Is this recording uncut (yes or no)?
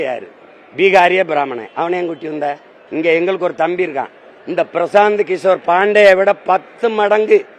yes